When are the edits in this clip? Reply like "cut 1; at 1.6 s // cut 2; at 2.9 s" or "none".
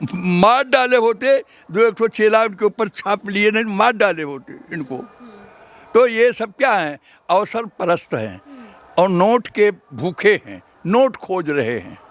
none

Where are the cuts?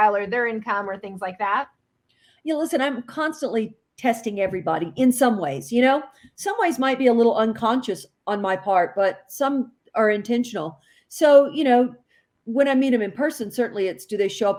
none

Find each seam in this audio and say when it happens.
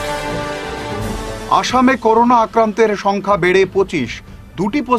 none

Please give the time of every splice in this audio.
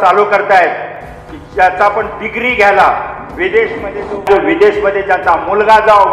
cut 1; at 4.3 s

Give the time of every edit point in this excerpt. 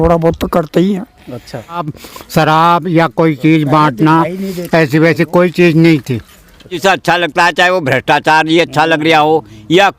cut 1; at 2.0 s // cut 2; at 6.8 s

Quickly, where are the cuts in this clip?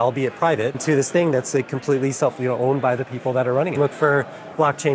cut 1; at 0.8 s // cut 2; at 3.7 s

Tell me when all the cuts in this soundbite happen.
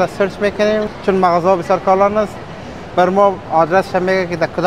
none

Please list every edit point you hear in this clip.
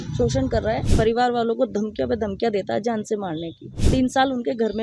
cut 1; at 0.9 s // cut 2; at 3.8 s

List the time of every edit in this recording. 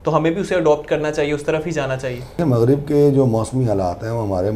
cut 1; at 2.4 s

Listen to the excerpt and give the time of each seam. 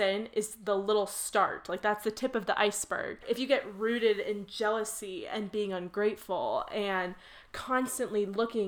cut 1; at 3.2 s

